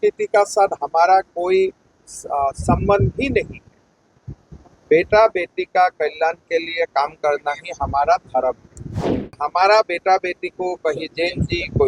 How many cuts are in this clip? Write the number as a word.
one